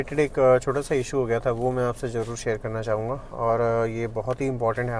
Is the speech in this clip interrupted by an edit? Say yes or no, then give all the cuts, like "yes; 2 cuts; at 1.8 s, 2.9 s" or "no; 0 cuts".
no; 0 cuts